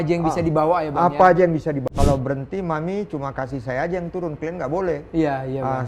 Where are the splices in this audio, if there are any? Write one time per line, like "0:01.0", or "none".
0:01.9